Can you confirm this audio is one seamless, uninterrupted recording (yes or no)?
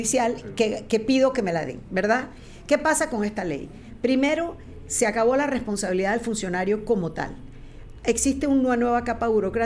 yes